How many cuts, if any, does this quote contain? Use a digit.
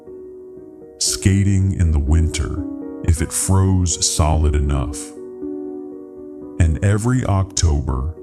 0